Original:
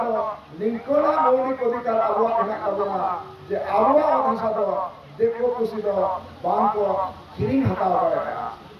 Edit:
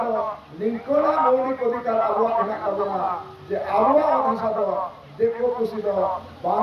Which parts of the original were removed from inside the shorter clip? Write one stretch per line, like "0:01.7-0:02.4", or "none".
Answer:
none